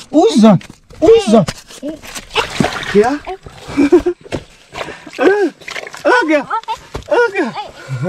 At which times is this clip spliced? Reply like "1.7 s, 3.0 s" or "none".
none